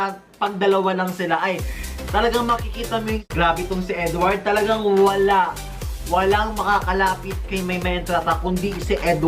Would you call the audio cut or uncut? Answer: cut